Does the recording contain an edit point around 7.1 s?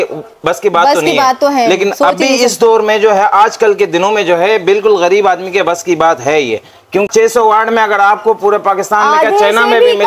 yes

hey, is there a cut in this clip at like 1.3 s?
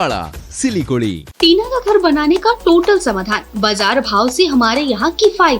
yes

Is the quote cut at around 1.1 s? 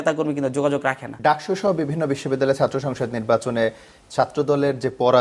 yes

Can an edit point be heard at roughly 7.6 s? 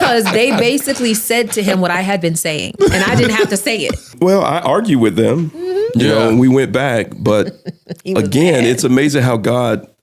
no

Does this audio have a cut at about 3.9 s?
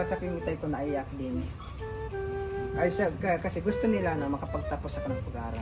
no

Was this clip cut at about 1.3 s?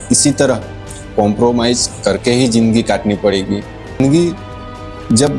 no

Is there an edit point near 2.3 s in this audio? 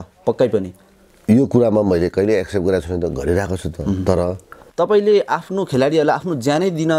no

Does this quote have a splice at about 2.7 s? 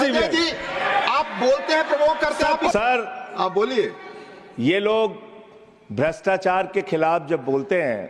yes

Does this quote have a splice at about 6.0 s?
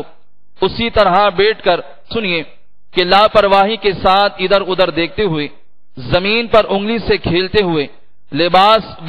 no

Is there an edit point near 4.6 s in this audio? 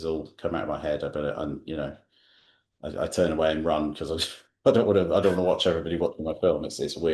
no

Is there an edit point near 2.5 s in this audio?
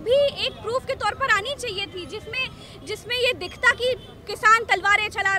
no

